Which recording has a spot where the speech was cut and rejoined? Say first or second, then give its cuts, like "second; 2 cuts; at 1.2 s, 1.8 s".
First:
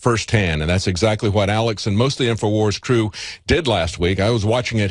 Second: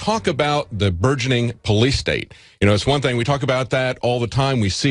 second; 1 cut; at 3.6 s